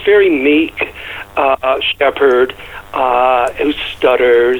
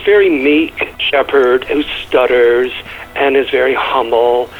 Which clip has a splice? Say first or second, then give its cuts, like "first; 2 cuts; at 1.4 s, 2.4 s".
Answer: second; 2 cuts; at 1.0 s, 1.7 s